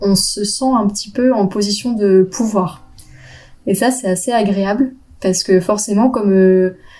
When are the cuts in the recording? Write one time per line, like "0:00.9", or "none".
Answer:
none